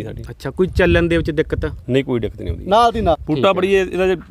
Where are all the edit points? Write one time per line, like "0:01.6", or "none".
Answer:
0:03.2